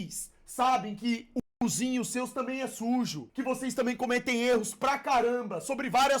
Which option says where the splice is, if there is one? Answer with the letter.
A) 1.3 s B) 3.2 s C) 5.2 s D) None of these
B